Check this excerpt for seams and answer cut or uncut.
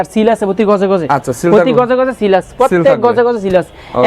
uncut